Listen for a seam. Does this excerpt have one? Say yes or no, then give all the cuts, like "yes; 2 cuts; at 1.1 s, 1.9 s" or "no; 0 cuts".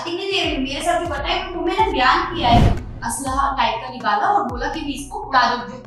yes; 1 cut; at 2.7 s